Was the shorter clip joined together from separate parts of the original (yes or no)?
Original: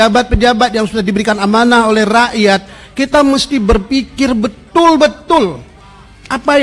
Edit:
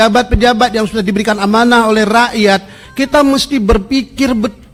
no